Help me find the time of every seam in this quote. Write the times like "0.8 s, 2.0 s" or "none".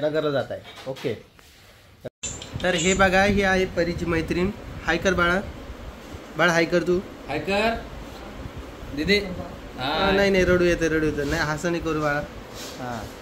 2.1 s